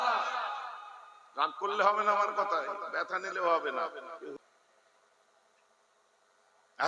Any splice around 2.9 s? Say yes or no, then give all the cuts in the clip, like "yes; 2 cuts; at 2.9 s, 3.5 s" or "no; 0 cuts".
no; 1 cut; at 4.4 s